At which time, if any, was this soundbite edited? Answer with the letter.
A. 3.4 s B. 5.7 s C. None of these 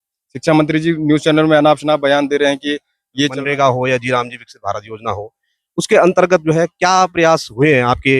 A